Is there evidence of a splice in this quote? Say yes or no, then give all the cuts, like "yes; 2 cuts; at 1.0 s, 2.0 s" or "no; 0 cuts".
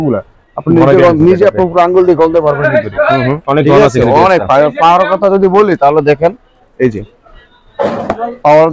no; 0 cuts